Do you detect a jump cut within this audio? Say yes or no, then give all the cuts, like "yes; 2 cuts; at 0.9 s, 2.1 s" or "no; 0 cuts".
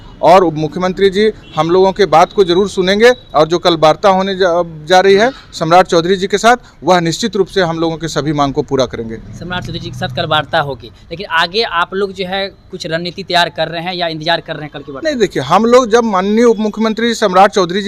no; 0 cuts